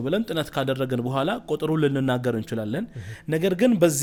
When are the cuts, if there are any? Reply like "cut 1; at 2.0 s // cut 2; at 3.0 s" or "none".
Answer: none